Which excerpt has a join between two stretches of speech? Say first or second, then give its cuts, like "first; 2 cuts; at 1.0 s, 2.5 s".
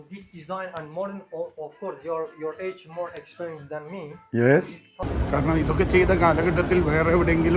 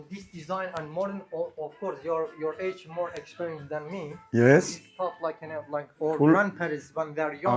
first; 1 cut; at 5.0 s